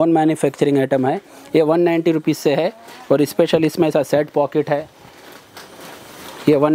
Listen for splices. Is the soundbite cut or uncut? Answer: uncut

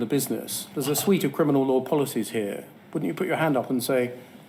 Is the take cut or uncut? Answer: uncut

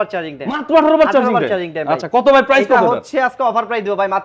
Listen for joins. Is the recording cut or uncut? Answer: uncut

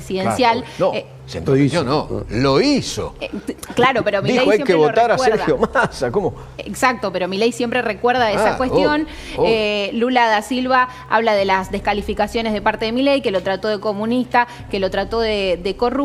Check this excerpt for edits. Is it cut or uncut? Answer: uncut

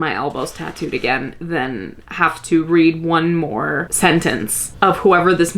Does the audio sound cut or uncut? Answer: uncut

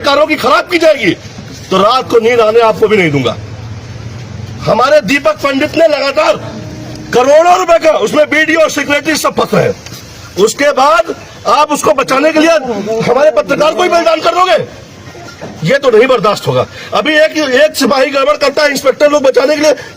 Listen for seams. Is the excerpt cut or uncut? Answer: uncut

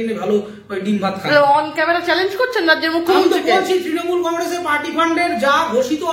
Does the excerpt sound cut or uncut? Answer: uncut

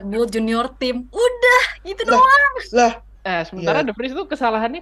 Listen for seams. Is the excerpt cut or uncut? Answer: cut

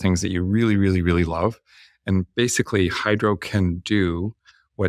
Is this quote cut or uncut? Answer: uncut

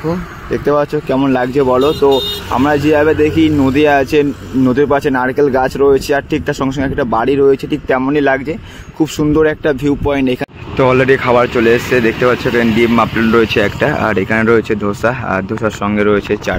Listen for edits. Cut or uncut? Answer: cut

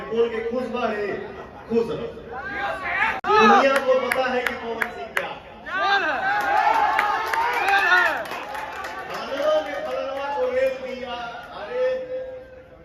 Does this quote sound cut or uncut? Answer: uncut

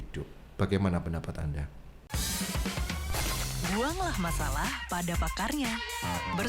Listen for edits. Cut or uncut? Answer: cut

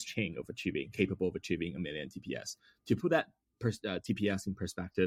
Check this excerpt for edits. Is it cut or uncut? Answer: uncut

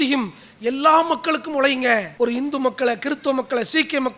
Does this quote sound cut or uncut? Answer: cut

